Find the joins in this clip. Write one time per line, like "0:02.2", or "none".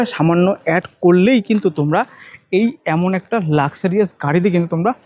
none